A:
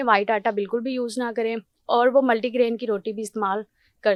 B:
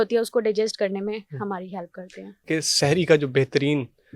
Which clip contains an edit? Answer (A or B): B